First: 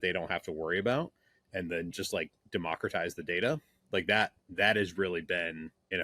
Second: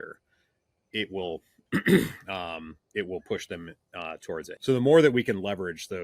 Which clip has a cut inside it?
second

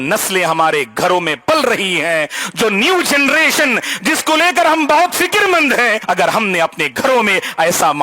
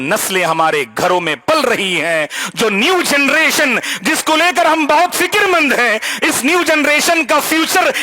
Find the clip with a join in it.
first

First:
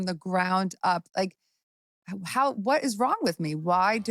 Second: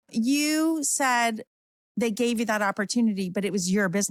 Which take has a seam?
first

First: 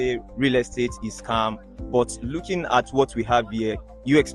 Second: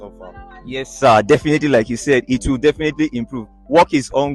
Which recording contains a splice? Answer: first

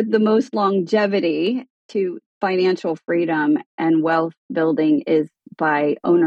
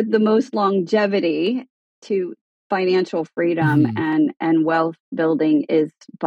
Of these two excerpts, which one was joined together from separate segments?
first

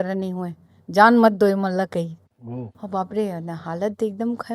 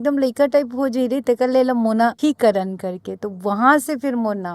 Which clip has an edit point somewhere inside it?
second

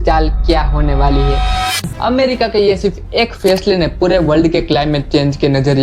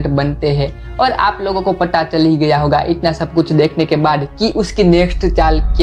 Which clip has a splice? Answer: first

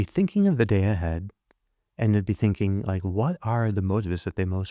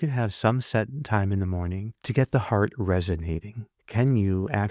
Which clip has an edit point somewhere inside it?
second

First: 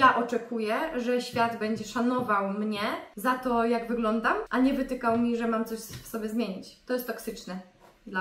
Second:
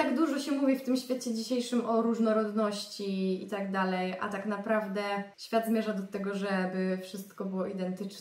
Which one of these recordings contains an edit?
first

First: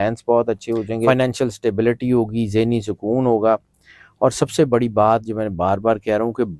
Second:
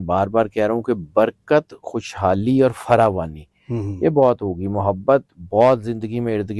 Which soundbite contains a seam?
first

